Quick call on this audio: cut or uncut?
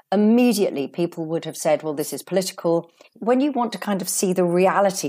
cut